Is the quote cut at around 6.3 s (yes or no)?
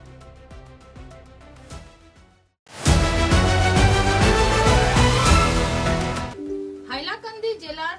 yes